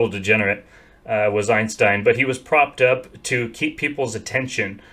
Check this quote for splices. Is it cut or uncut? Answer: uncut